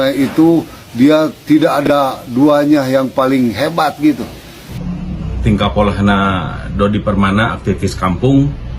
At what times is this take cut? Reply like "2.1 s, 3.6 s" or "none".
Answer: 4.8 s